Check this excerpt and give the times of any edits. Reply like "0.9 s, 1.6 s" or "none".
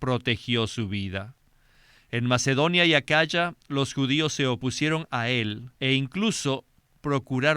5.7 s